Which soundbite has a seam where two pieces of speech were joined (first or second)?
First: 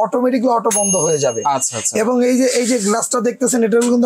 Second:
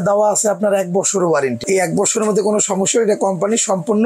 second